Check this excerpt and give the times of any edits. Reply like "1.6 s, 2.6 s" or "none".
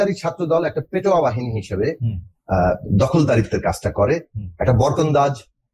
none